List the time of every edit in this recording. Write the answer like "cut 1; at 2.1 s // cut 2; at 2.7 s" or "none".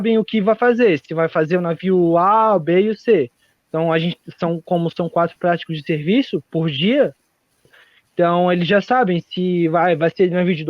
cut 1; at 7.8 s